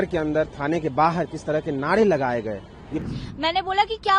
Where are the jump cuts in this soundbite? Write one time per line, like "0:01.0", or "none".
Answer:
0:03.0